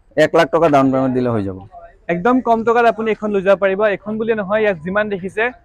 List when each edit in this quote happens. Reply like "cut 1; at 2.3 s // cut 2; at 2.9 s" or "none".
none